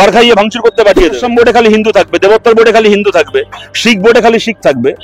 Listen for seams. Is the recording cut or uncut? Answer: cut